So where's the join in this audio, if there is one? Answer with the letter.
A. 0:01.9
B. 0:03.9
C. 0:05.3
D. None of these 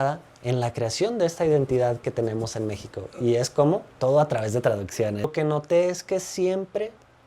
C